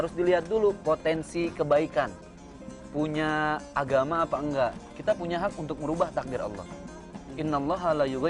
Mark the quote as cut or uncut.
cut